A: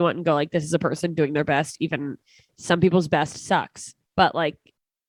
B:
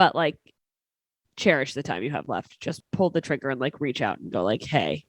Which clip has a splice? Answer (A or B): B